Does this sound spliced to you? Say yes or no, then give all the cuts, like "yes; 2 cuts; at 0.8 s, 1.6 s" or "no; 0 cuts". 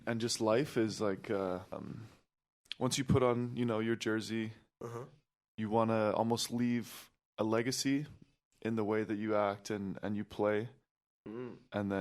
yes; 1 cut; at 1.7 s